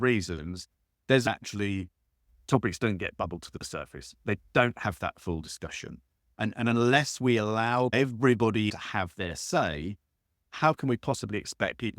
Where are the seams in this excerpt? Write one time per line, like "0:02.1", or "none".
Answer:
0:01.3
0:07.9
0:08.7